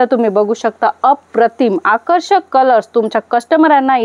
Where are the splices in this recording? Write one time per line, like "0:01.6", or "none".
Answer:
none